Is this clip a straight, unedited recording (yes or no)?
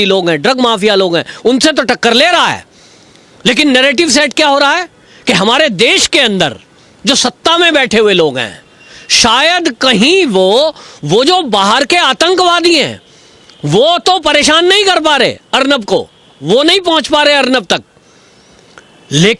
yes